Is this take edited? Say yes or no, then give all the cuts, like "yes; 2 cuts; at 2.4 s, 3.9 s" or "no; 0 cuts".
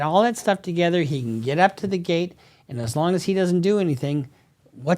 no; 0 cuts